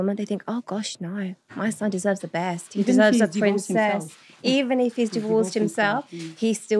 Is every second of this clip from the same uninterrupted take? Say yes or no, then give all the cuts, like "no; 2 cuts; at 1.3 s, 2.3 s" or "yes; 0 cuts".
yes; 0 cuts